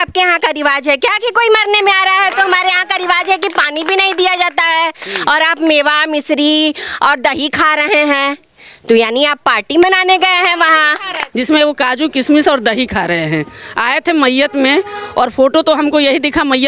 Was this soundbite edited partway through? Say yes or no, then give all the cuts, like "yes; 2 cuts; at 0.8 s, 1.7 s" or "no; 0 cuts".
yes; 1 cut; at 11.2 s